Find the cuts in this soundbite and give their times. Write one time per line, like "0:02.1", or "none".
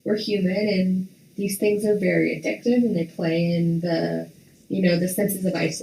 0:01.2